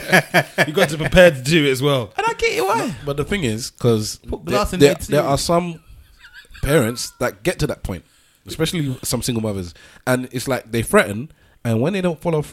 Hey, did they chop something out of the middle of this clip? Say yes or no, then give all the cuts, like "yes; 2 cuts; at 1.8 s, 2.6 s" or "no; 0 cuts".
no; 0 cuts